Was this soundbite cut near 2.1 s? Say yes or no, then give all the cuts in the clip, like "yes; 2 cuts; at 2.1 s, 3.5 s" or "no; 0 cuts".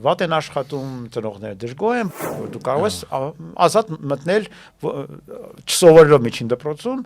yes; 1 cut; at 2.1 s